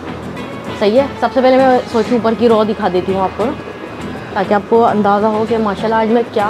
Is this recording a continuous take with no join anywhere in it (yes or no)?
yes